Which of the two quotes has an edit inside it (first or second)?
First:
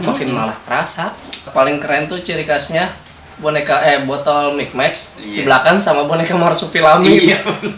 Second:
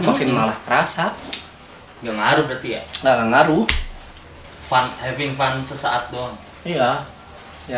first